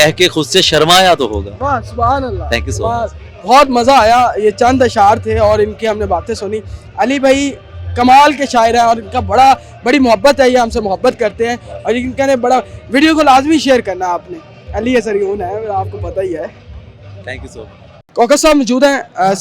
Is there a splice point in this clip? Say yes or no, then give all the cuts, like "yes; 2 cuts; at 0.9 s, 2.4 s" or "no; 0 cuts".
no; 0 cuts